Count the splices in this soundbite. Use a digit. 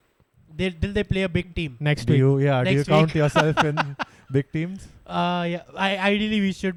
0